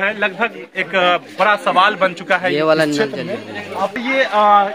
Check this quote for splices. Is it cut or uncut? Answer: cut